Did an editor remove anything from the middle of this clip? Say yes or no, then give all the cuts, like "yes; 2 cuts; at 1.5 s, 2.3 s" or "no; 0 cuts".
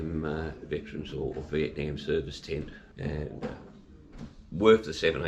yes; 1 cut; at 2.8 s